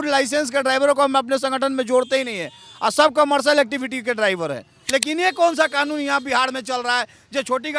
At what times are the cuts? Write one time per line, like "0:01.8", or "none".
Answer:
0:04.7